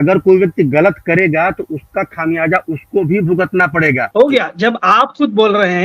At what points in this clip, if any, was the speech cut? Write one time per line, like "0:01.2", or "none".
0:04.1